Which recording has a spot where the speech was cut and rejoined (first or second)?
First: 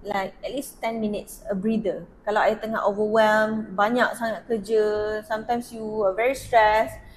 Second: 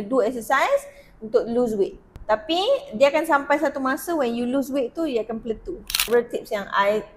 second